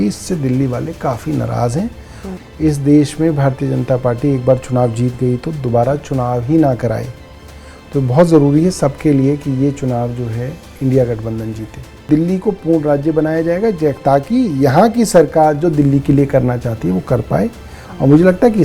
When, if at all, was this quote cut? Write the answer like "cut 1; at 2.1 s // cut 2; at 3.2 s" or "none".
cut 1; at 2.2 s // cut 2; at 12.0 s

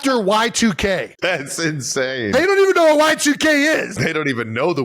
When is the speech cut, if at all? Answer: cut 1; at 1.1 s // cut 2; at 3.9 s

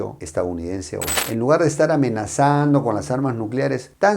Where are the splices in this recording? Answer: cut 1; at 1.2 s

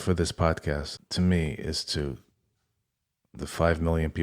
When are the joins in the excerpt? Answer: cut 1; at 1.0 s

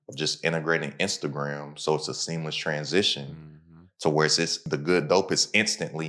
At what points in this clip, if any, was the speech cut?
none

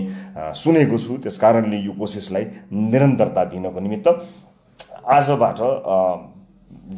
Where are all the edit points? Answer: none

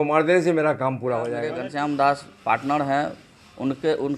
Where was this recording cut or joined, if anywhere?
cut 1; at 1.6 s

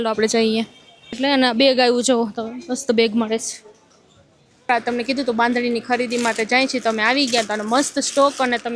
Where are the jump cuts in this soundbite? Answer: cut 1; at 1.2 s // cut 2; at 4.7 s

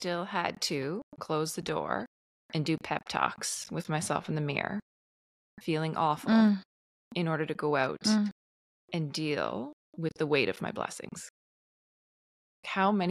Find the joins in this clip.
cut 1; at 12.0 s

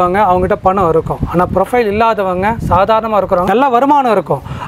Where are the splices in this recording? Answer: none

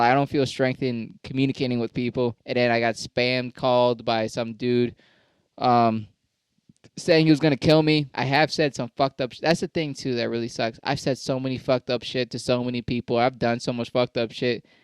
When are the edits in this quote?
cut 1; at 2.4 s // cut 2; at 8.1 s

